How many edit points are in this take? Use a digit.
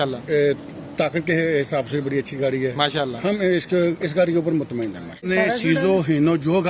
1